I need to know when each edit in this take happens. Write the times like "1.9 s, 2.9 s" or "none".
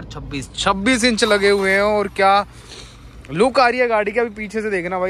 none